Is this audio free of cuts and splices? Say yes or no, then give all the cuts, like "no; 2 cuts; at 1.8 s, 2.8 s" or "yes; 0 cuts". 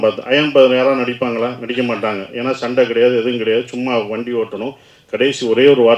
yes; 0 cuts